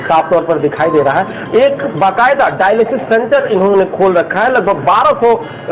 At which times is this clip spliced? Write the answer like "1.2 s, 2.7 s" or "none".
1.4 s